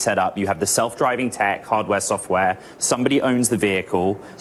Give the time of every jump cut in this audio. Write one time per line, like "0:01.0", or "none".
none

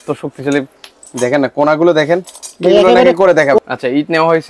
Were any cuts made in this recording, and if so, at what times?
0:03.6

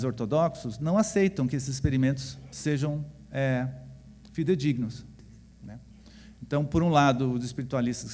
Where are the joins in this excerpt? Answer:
0:05.1

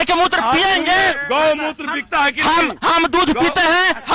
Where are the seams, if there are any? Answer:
0:01.2

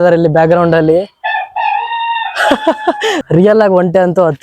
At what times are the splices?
0:01.2
0:03.2

